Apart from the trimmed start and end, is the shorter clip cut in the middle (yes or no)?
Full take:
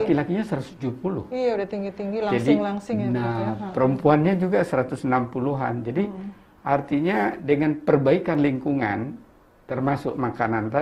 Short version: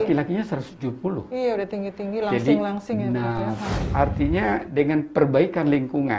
yes